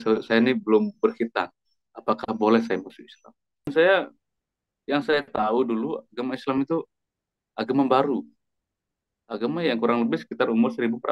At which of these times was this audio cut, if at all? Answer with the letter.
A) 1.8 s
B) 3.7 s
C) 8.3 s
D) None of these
B